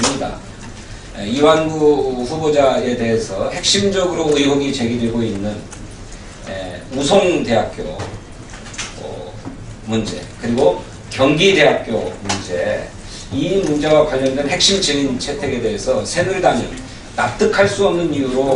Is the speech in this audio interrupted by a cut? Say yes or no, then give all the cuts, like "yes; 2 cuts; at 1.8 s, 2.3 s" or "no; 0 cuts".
yes; 1 cut; at 6.0 s